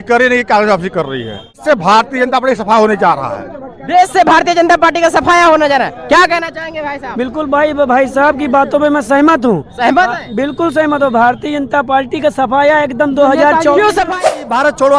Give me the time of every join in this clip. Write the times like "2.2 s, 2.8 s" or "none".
1.6 s, 14.2 s